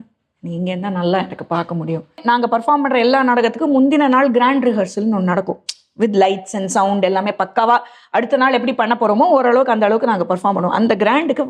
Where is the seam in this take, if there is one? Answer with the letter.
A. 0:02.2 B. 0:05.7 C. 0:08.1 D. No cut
A